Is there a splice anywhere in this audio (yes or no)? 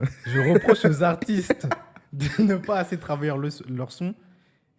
no